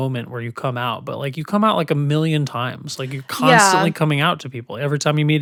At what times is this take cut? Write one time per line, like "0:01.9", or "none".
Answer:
none